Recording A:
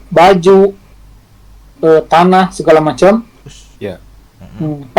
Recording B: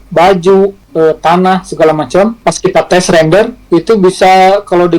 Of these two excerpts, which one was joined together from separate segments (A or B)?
B